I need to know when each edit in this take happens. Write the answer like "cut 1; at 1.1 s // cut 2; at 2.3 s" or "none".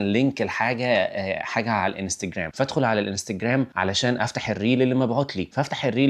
none